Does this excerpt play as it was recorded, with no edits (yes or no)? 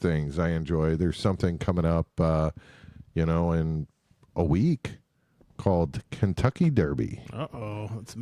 yes